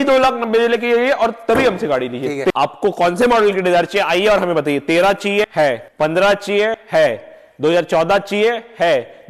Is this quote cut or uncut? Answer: cut